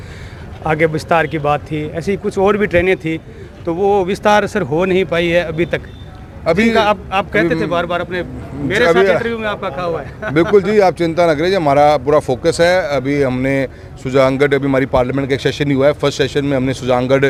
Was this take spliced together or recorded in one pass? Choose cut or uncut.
uncut